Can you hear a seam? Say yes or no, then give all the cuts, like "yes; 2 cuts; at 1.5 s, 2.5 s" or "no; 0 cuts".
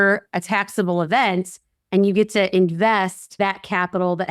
yes; 1 cut; at 3.2 s